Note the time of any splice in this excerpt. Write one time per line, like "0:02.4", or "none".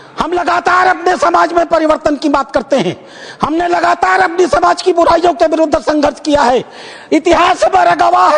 none